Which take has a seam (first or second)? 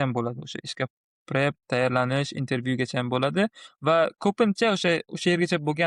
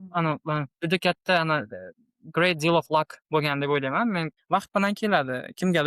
second